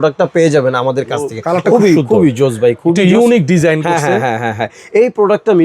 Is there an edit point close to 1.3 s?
yes; 1 cut; at 1.3 s

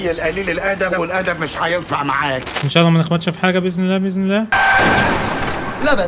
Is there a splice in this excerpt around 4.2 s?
no; 1 cut; at 2.6 s

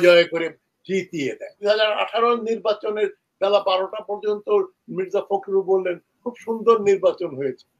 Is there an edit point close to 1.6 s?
yes; 1 cut; at 1.6 s

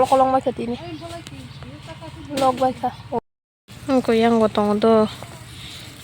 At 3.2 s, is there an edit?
yes; 1 cut; at 3.2 s

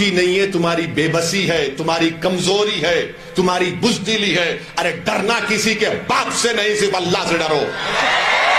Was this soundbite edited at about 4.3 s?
no; 0 cuts

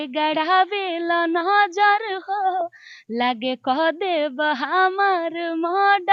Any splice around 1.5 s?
no; 0 cuts

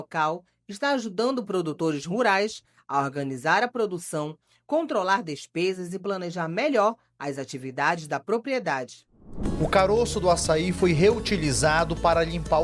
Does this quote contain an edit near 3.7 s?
no; 1 cut; at 9.4 s

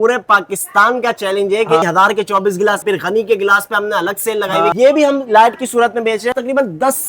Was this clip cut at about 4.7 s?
yes; 4 cuts; at 1.8 s, 2.8 s, 4.7 s, 6.3 s

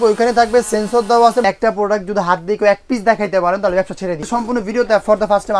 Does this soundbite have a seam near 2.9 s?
no; 2 cuts; at 1.4 s, 4.2 s

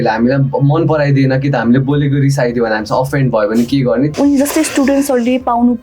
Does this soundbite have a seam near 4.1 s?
yes; 1 cut; at 4.1 s

